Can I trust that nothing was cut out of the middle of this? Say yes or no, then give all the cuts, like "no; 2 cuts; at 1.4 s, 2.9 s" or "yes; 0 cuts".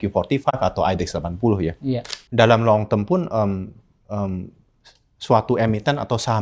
no; 1 cut; at 2.2 s